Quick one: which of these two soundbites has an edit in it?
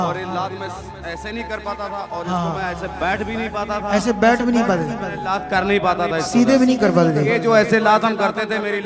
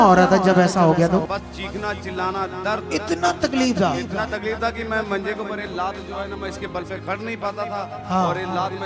second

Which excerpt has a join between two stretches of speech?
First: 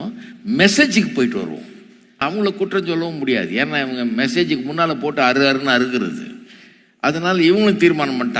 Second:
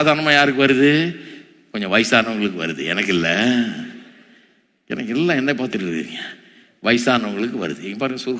first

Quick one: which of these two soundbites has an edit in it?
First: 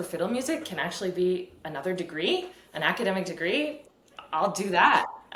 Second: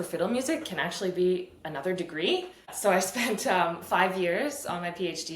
second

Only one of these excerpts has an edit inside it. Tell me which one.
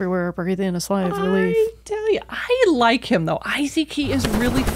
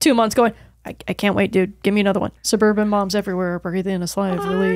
second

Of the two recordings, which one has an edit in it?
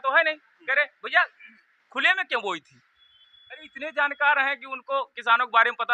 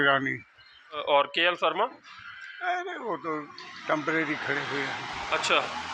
second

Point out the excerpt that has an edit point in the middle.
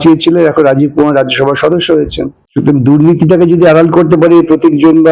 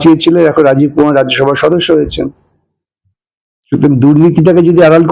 first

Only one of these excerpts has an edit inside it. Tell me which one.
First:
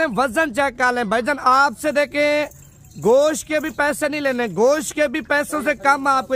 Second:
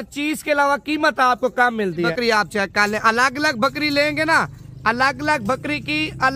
second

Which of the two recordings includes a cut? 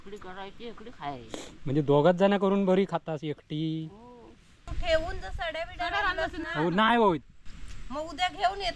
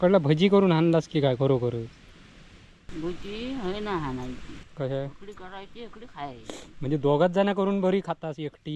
first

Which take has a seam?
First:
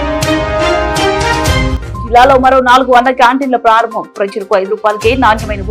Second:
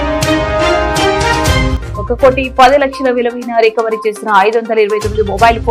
first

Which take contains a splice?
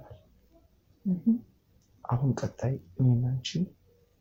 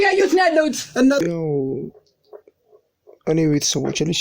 second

